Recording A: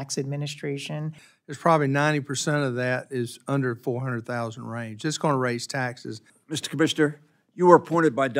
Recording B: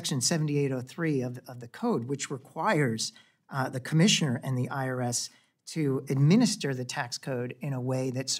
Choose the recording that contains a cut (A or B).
A